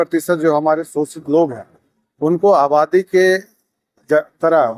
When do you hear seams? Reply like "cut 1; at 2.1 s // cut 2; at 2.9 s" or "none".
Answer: none